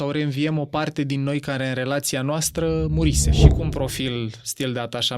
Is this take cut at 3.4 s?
yes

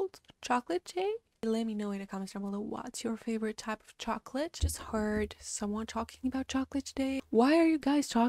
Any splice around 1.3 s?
yes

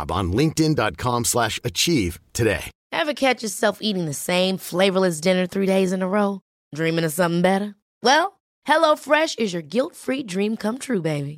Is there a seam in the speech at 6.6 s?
no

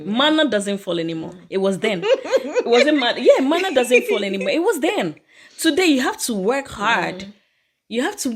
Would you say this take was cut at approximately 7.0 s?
no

